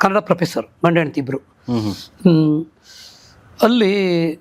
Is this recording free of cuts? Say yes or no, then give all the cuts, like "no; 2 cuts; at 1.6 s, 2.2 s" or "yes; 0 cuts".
yes; 0 cuts